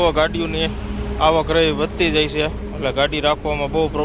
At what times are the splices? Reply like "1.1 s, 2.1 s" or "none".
none